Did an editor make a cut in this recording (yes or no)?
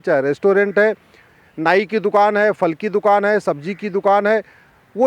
no